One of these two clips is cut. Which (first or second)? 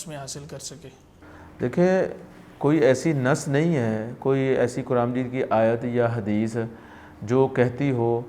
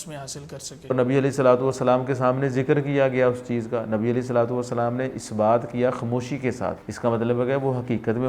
second